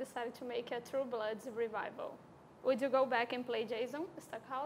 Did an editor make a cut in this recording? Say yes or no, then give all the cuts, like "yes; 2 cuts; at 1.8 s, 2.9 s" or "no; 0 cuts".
no; 0 cuts